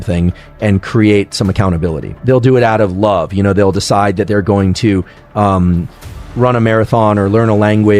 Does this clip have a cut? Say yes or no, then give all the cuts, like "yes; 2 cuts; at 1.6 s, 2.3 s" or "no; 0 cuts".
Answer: yes; 1 cut; at 2.2 s